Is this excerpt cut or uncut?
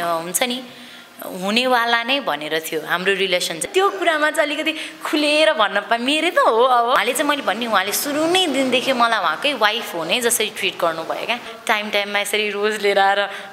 cut